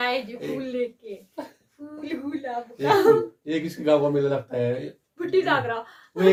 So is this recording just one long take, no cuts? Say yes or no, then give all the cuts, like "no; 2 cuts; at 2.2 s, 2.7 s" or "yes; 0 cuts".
yes; 0 cuts